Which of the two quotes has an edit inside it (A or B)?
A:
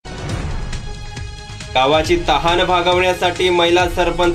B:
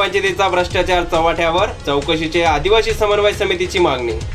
A